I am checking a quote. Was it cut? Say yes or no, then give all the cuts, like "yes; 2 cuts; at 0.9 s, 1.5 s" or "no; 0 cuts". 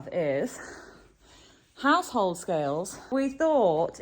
yes; 1 cut; at 3.1 s